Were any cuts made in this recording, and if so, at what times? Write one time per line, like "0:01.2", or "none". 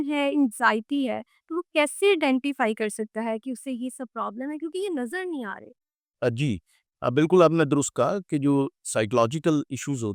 none